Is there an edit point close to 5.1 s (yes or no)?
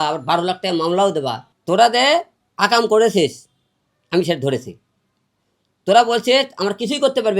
no